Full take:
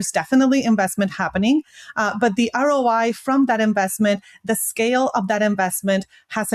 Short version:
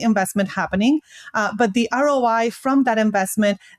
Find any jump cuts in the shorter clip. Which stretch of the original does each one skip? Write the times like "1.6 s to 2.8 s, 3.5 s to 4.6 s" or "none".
none